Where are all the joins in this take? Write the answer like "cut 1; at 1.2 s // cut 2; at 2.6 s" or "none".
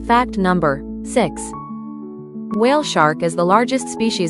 cut 1; at 0.9 s